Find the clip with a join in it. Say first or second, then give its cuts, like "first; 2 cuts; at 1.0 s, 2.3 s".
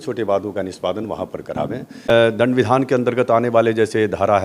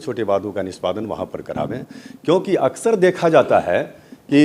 first; 1 cut; at 2.1 s